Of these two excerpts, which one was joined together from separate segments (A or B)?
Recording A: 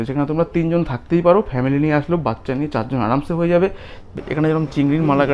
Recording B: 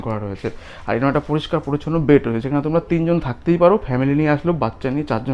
A